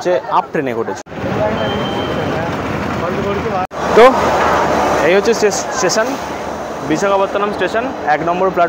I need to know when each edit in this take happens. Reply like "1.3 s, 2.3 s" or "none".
1.0 s, 3.7 s